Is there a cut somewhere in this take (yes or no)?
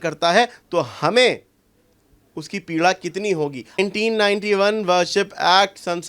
yes